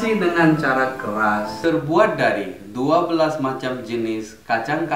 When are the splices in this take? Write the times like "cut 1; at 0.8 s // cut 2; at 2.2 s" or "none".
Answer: cut 1; at 1.6 s